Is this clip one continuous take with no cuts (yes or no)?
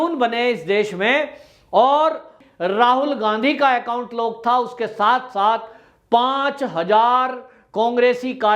no